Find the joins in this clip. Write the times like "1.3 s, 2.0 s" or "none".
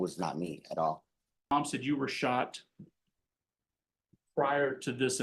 1.5 s